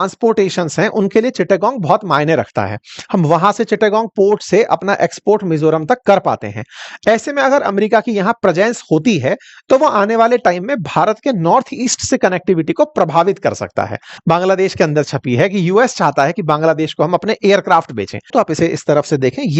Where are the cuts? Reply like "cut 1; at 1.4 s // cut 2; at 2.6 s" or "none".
cut 1; at 14.2 s // cut 2; at 18.3 s